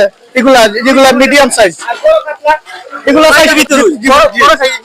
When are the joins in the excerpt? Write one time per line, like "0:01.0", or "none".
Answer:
0:03.5